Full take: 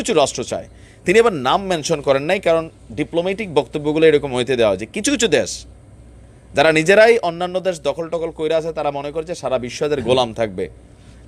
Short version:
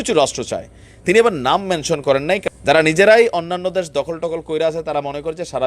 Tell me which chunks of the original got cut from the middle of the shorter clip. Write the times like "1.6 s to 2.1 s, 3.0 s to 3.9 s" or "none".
2.4 s to 6.3 s